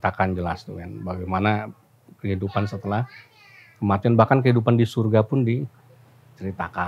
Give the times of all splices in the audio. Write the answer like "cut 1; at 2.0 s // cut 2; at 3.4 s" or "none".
none